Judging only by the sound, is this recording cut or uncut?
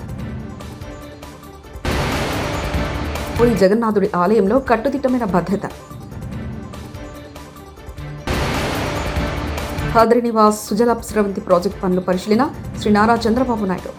uncut